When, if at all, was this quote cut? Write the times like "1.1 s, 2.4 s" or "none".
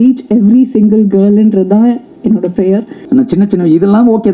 2.9 s